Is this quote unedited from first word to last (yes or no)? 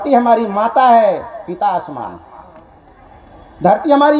yes